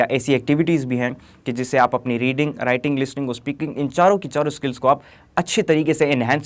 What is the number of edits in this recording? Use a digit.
0